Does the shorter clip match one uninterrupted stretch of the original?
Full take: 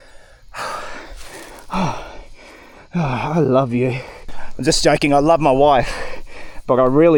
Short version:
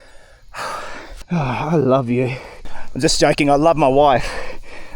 no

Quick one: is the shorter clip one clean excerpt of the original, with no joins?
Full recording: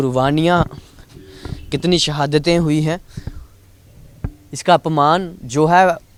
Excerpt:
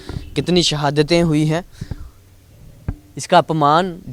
yes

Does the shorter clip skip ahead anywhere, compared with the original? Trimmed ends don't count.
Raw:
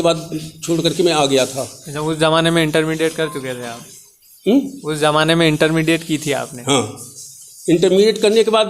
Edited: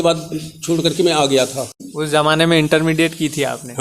yes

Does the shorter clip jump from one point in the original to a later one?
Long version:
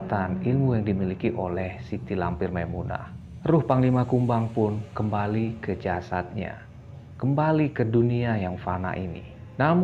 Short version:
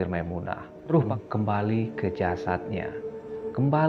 yes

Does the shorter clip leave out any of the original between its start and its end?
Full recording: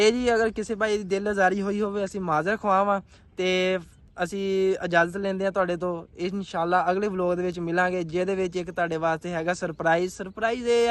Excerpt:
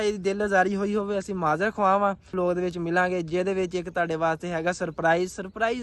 yes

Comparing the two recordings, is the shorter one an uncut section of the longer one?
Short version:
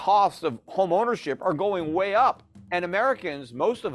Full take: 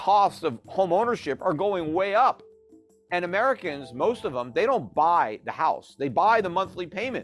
no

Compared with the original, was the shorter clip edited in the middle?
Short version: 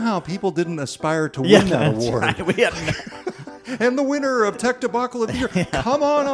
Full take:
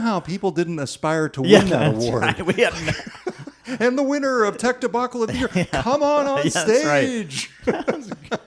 no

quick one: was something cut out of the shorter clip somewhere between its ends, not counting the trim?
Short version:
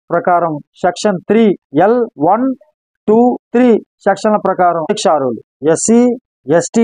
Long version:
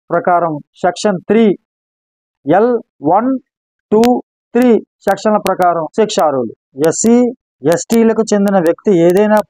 yes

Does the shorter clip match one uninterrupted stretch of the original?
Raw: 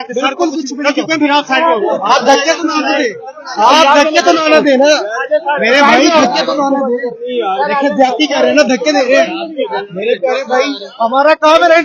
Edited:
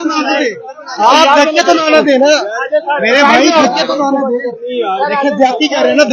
yes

